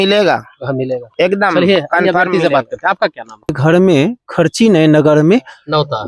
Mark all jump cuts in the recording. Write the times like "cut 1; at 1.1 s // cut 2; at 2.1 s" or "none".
cut 1; at 3.6 s